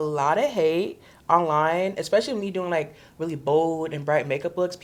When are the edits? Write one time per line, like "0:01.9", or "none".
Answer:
none